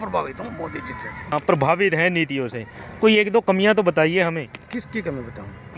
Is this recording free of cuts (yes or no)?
yes